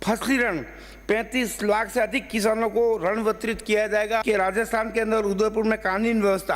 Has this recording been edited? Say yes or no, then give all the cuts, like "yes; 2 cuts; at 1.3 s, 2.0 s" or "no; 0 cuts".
yes; 1 cut; at 4.2 s